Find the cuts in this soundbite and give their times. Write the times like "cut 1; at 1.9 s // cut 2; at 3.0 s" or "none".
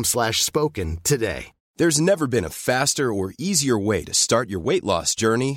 cut 1; at 1.6 s